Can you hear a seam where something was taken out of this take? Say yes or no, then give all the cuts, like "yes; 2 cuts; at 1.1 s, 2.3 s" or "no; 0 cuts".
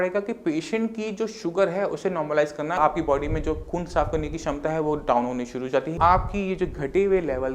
yes; 2 cuts; at 2.8 s, 5.9 s